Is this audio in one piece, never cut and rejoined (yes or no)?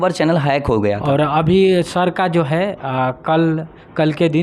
no